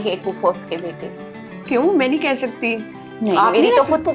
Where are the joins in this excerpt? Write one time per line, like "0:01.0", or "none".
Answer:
none